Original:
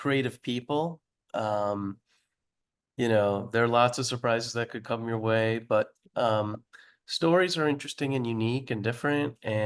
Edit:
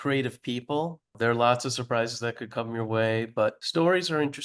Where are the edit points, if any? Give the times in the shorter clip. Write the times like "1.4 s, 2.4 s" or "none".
1.1 s, 3.6 s